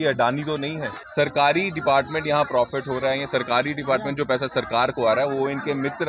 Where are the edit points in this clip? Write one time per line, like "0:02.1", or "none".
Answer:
0:01.0